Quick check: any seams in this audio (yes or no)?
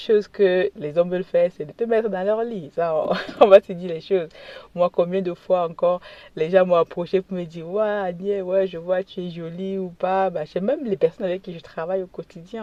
no